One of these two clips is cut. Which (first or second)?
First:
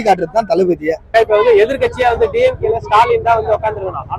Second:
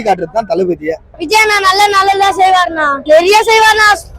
second